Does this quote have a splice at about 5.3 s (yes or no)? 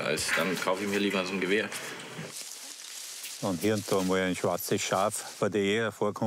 no